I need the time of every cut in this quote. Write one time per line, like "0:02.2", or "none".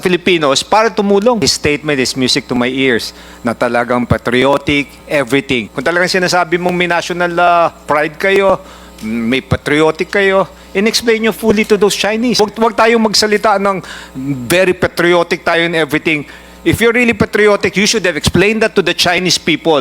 0:01.4
0:05.7
0:12.4